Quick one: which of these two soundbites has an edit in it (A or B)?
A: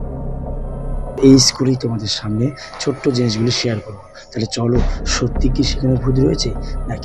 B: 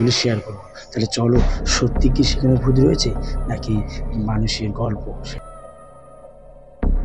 B